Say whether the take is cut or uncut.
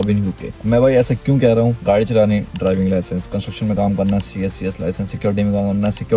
cut